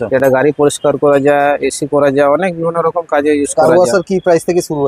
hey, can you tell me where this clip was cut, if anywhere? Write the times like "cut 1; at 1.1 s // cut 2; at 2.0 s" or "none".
none